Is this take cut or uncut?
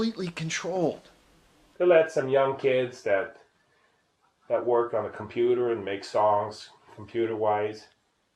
cut